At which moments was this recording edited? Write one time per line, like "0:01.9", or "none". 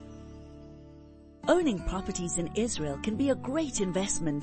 0:01.3